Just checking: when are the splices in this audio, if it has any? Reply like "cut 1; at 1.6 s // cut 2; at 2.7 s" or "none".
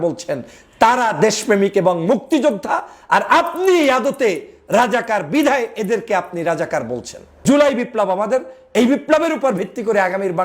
cut 1; at 7.4 s